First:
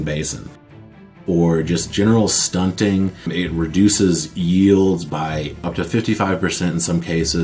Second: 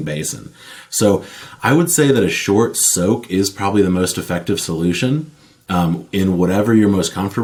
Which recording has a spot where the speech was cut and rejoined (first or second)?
first